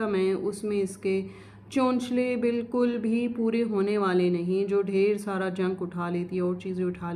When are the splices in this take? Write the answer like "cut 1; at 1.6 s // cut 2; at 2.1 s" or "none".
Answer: none